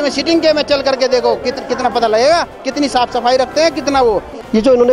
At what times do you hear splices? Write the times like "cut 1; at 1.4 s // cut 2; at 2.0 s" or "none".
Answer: none